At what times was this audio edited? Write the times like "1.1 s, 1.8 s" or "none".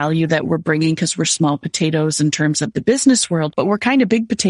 3.5 s